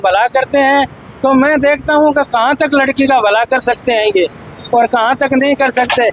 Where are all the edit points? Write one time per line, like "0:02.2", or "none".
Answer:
none

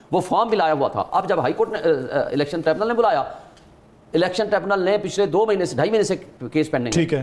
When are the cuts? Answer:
none

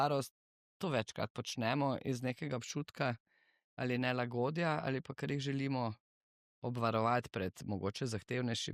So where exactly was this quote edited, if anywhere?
none

